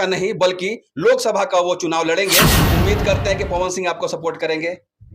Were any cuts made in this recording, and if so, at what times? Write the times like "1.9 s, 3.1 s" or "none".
2.6 s